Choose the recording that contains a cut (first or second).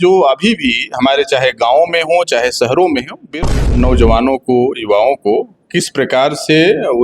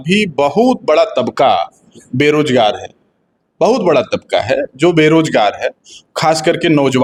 first